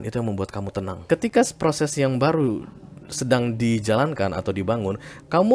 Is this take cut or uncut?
cut